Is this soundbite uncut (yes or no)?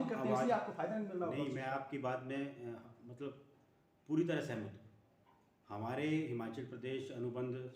yes